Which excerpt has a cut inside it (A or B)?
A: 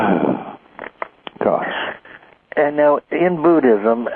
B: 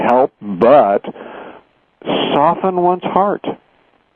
A